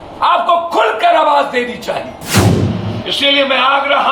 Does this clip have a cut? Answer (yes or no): yes